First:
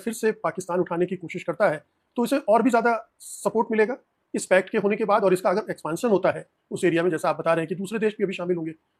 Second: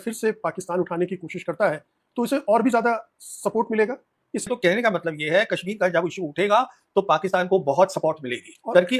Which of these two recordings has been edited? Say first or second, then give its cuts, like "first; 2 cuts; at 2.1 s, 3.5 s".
second; 1 cut; at 4.5 s